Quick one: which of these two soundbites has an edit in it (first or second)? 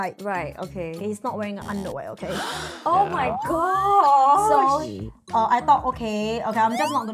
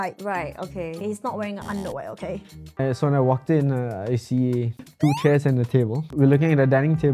second